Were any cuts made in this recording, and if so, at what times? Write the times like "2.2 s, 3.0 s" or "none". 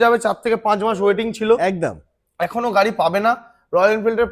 none